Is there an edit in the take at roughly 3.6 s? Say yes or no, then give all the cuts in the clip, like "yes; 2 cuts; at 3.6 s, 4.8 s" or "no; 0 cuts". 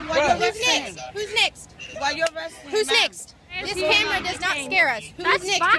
yes; 1 cut; at 3.6 s